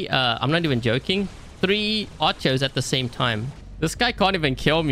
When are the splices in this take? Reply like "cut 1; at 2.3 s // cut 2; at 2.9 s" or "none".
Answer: cut 1; at 3.6 s